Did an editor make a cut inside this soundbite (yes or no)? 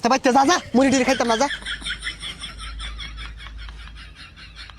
yes